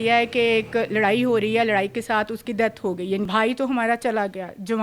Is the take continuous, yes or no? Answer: no